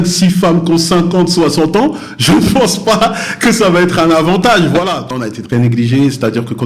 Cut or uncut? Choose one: cut